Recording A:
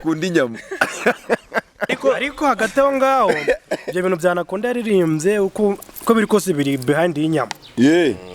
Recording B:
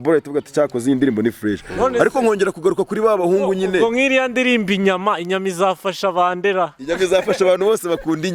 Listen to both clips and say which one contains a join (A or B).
A